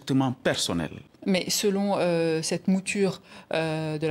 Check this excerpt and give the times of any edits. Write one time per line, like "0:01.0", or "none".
0:01.1